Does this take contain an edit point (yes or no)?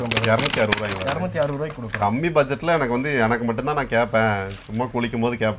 no